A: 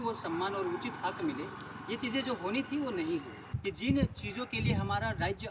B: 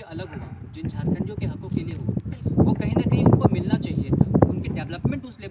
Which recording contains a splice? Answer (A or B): A